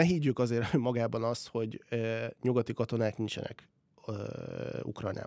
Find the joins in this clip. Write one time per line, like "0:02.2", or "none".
none